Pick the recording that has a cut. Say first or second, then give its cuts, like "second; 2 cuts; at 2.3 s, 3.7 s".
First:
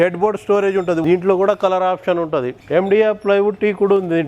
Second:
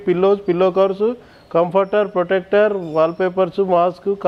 first; 2 cuts; at 1.0 s, 2.6 s